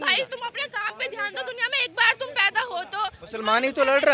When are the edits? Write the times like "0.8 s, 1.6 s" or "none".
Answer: none